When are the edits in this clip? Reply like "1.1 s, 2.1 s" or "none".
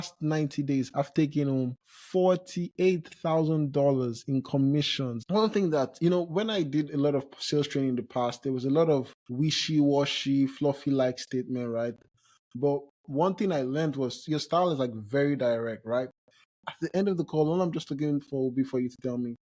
5.2 s, 14.3 s, 16.5 s

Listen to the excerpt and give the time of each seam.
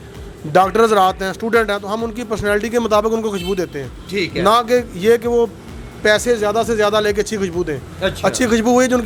none

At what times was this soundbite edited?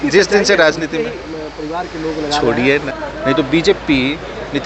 3.0 s

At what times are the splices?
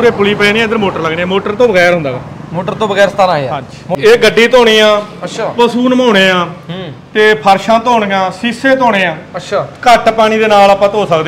4.0 s

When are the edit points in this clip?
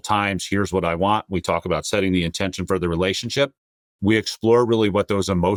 none

